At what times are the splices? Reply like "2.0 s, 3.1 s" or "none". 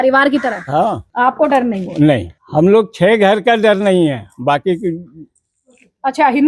1.1 s, 2.4 s